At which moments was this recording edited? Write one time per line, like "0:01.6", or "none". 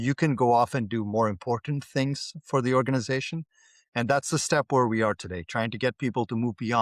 none